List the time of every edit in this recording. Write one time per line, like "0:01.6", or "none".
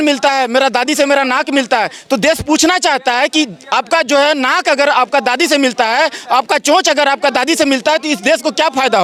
none